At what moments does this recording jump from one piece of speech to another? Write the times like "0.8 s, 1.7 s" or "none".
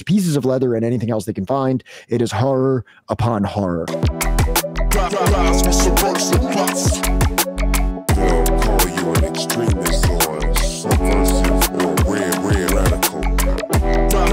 3.9 s